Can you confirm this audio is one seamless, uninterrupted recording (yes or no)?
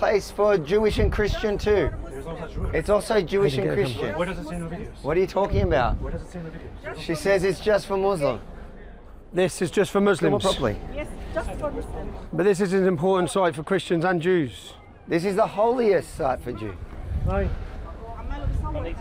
yes